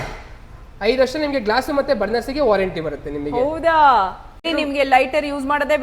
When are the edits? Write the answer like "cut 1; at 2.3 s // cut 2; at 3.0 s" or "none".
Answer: cut 1; at 4.5 s